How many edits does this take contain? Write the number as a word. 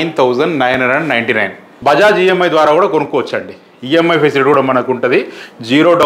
one